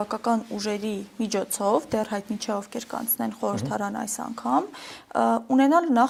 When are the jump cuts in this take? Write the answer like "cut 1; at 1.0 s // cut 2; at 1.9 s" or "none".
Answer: none